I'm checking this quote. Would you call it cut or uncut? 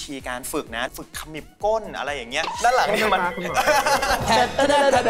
cut